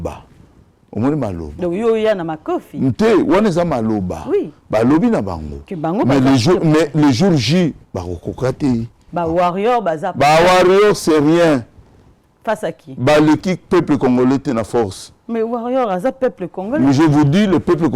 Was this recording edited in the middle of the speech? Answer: yes; 1 cut; at 9.0 s

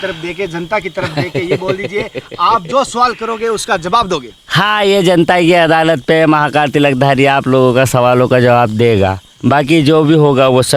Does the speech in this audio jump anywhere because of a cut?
no; 0 cuts

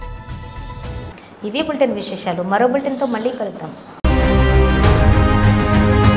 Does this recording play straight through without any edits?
yes; 0 cuts

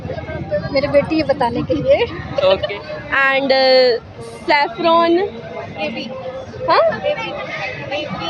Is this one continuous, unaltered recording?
no; 1 cut; at 2.7 s

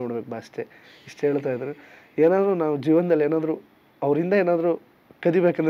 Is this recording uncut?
yes; 0 cuts

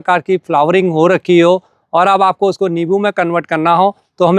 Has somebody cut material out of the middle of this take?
no; 0 cuts

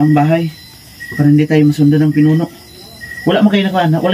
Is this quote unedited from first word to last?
yes; 0 cuts

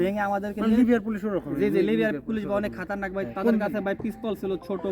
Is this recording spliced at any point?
no; 0 cuts

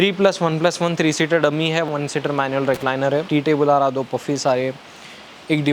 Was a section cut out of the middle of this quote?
yes; 2 cuts; at 1.9 s, 3.3 s

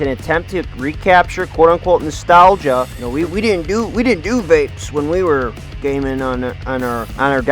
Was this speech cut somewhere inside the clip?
yes; 1 cut; at 3.0 s

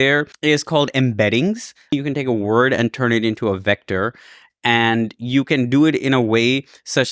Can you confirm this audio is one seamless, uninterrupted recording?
no; 1 cut; at 1.9 s

